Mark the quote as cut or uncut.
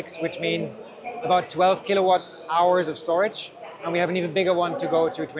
uncut